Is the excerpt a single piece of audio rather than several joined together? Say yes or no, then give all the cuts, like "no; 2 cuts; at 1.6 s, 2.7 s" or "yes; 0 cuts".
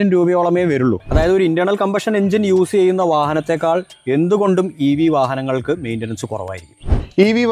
no; 1 cut; at 1.0 s